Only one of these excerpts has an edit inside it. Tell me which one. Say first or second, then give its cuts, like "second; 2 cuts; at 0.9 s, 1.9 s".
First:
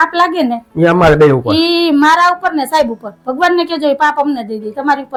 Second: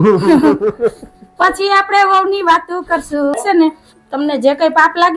second; 1 cut; at 3.4 s